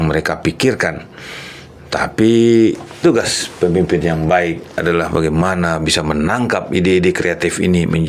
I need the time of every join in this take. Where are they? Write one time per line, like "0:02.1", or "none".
none